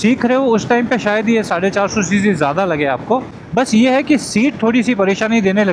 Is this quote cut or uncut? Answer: cut